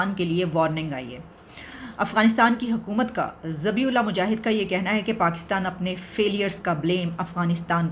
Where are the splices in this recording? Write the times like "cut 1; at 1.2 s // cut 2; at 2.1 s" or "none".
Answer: none

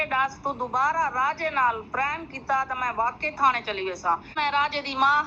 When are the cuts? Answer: cut 1; at 4.3 s

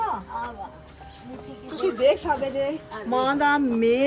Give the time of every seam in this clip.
none

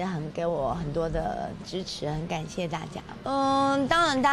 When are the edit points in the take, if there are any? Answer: cut 1; at 3.1 s

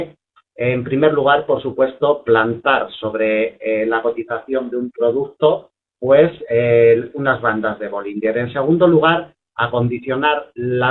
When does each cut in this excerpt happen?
cut 1; at 9.3 s

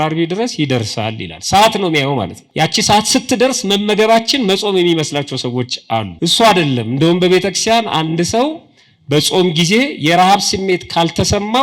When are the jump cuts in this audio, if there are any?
cut 1; at 2.4 s // cut 2; at 6.1 s

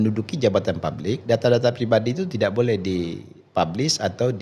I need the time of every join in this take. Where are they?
none

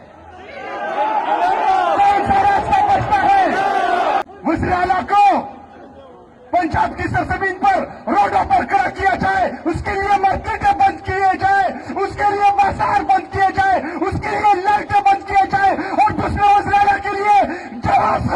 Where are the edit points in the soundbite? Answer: cut 1; at 4.2 s

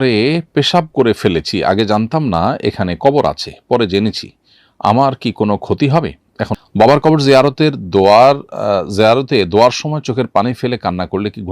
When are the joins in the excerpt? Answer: cut 1; at 6.6 s

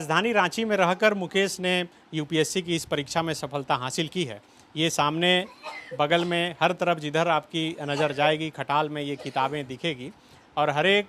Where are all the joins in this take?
none

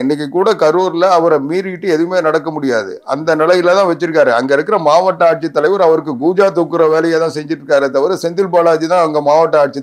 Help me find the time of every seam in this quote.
none

